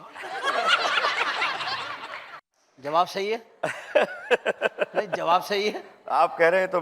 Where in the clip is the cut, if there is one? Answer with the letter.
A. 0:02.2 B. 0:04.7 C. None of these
C